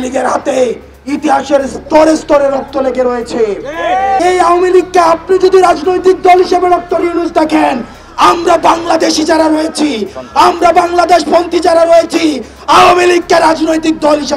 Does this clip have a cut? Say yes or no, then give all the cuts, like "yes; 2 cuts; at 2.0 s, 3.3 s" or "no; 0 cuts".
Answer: yes; 1 cut; at 4.2 s